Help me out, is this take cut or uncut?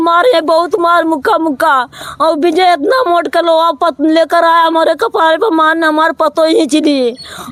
uncut